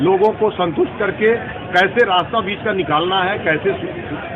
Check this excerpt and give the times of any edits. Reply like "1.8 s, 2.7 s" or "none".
none